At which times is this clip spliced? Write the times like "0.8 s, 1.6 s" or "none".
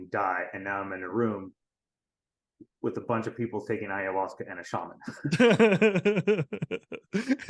none

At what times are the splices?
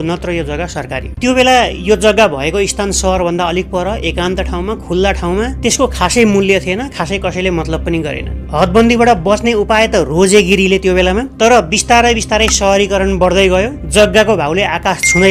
none

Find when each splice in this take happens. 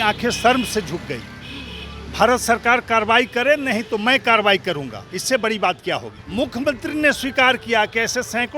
6.1 s

